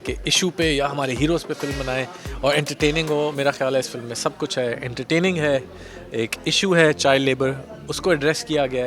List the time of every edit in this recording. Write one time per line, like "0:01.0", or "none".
none